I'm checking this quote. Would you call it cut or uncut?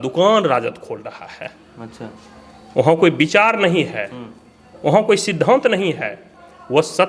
uncut